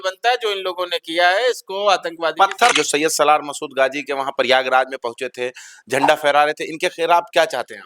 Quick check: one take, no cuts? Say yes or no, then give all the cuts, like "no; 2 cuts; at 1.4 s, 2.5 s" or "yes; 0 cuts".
no; 1 cut; at 2.7 s